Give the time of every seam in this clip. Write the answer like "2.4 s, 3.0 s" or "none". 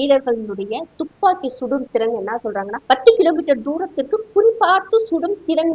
2.8 s